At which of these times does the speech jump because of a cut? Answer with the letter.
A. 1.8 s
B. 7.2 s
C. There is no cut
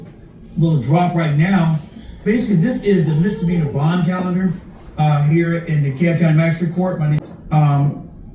B